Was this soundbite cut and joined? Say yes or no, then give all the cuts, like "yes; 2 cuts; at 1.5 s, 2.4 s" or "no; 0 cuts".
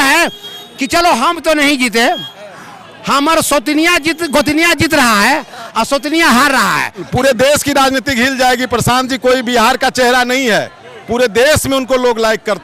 yes; 1 cut; at 7.1 s